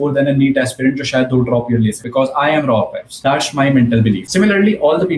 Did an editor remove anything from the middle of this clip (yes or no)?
yes